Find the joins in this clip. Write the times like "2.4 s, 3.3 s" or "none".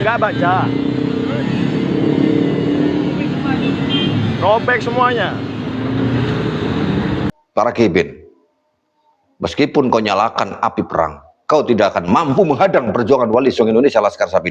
7.4 s